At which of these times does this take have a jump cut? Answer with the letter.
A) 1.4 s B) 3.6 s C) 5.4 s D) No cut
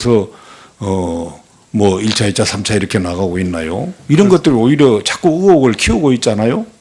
D